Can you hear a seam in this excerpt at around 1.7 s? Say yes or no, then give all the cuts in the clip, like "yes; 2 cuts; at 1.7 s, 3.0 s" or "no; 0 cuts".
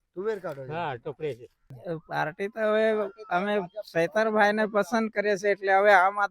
yes; 1 cut; at 1.7 s